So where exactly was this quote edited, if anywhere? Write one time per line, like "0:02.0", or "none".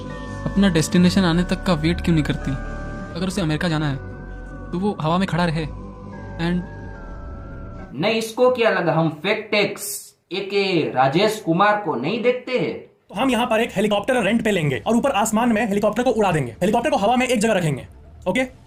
none